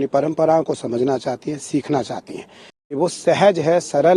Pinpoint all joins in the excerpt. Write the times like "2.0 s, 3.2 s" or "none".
2.9 s